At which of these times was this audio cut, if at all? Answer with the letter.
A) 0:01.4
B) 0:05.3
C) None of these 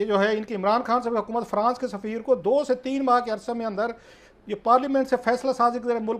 C